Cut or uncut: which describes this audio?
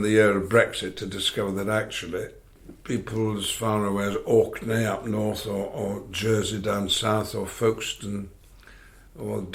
uncut